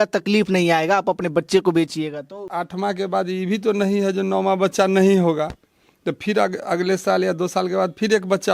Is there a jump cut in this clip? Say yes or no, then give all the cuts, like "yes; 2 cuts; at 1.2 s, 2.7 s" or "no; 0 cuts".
yes; 1 cut; at 2.5 s